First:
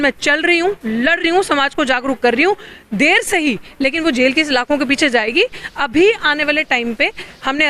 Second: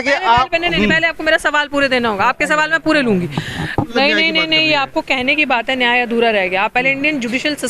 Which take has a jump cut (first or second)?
second